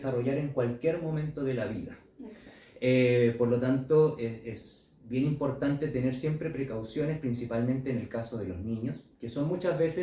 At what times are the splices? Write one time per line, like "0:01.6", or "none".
none

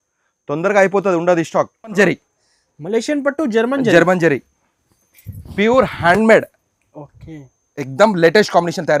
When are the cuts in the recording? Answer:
0:02.0

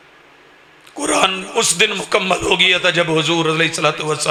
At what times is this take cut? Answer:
none

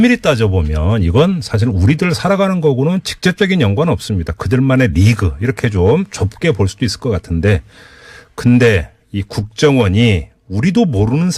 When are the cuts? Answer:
none

